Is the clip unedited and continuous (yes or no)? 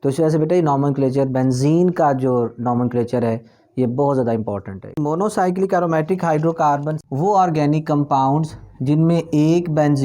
no